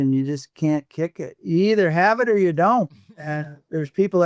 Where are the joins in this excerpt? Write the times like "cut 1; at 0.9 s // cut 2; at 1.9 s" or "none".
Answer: cut 1; at 1.3 s